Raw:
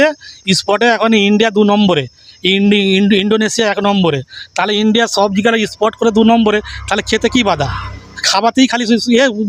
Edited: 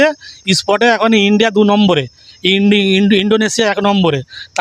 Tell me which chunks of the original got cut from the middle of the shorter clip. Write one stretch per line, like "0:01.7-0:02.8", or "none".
none

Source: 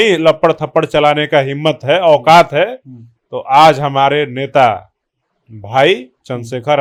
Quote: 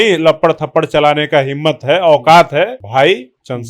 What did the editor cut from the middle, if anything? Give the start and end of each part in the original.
0:02.8-0:05.6

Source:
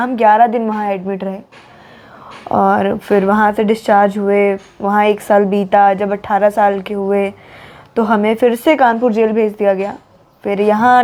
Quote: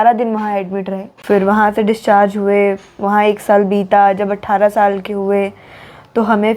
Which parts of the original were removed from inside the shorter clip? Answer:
0:01.5-0:03.0

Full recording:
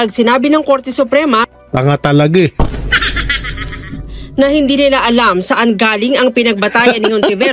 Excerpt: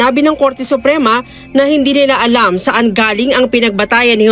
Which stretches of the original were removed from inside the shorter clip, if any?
0:01.6-0:04.1

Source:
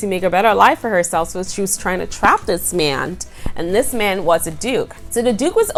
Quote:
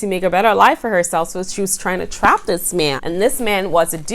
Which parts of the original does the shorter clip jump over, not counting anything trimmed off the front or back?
0:03.0-0:03.5

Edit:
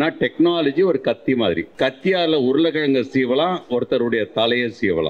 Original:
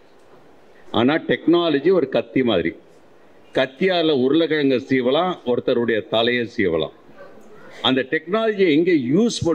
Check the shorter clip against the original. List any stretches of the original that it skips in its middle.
0:02.7-0:03.4

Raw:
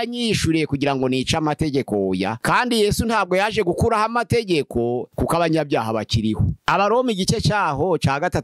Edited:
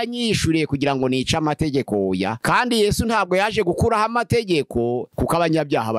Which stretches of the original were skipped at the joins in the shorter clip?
none

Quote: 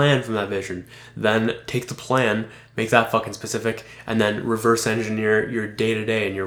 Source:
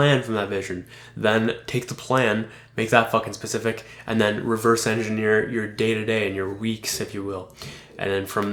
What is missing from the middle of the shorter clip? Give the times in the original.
none

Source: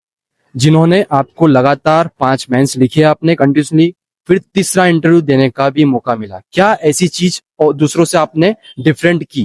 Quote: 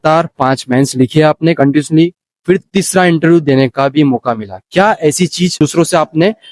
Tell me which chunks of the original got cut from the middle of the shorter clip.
0:07.4-0:07.8

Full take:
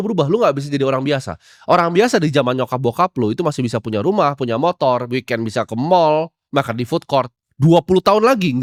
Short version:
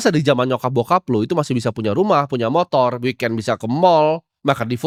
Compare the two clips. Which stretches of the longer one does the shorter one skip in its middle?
none

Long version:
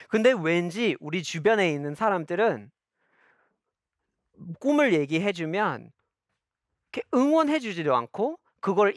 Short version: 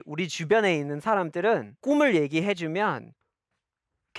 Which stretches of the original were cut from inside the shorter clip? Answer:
0:02.7-0:04.5

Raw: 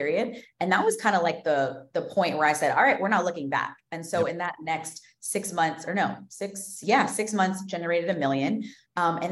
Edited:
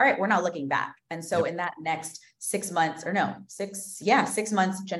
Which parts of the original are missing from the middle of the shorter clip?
none

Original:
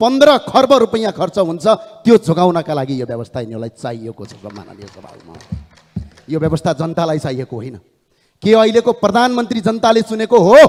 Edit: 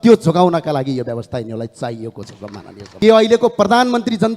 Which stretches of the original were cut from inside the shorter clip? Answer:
0:04.8-0:08.2

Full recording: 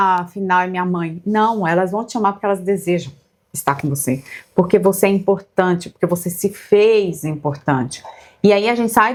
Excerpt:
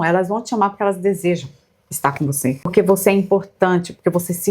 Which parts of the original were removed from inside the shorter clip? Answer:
0:04.3-0:04.7

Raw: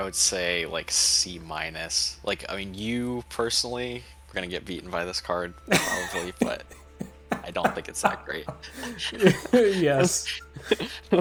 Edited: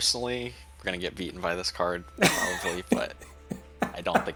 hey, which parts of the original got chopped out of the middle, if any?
none

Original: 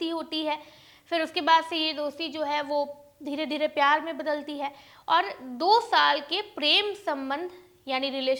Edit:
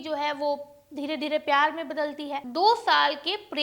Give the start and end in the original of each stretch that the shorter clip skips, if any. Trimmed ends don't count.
0:04.7-0:05.5

